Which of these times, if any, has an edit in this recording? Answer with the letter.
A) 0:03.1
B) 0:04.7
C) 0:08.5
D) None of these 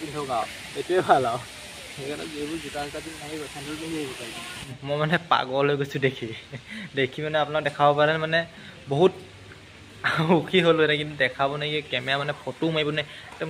B